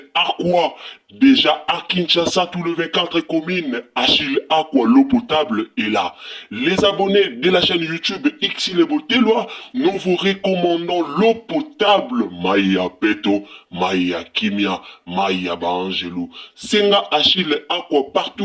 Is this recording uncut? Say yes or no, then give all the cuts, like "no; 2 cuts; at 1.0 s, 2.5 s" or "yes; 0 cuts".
yes; 0 cuts